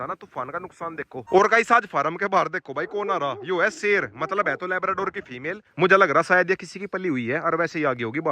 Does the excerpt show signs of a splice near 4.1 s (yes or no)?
no